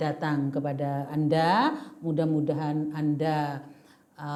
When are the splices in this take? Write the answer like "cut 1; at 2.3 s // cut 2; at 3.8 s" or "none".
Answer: none